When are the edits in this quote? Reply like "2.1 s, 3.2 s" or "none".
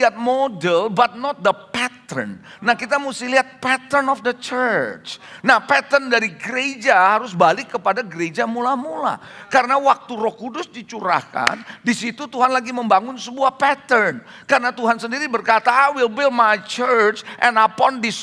none